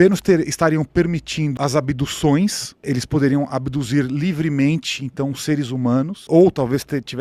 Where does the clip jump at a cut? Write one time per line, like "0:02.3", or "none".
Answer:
0:01.5
0:02.8
0:06.3